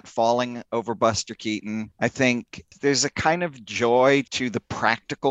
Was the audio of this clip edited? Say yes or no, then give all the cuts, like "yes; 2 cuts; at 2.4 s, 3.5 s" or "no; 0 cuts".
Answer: no; 0 cuts